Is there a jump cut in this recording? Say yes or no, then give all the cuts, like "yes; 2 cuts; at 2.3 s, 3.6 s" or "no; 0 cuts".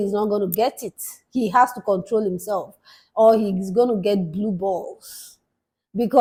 no; 0 cuts